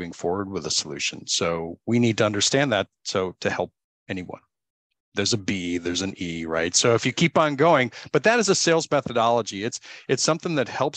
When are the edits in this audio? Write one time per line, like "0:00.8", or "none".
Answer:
none